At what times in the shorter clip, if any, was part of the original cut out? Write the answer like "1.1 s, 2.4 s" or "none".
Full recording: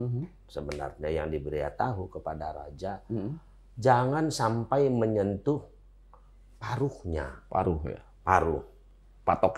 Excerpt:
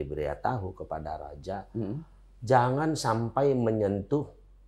none